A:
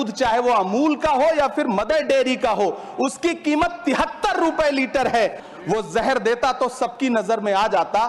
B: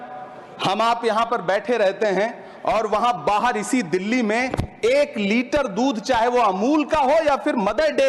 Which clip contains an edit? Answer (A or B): A